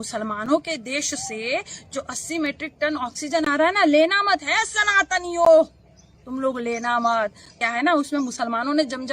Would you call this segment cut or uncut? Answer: cut